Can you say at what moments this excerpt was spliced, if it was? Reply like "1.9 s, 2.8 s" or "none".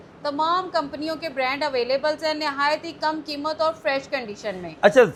none